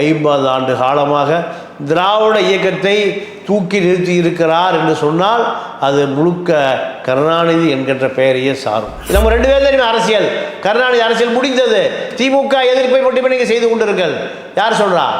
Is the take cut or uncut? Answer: cut